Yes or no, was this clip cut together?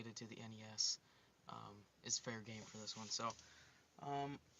yes